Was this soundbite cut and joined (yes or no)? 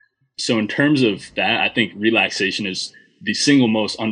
yes